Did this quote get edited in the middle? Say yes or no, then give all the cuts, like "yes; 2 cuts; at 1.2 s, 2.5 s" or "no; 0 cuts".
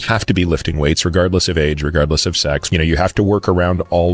yes; 1 cut; at 2.6 s